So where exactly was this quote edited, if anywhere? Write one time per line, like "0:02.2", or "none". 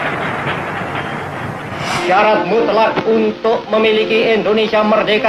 0:01.9